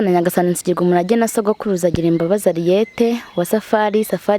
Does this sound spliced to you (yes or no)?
no